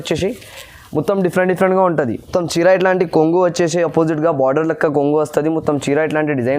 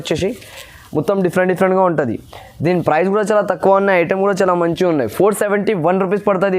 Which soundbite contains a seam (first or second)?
first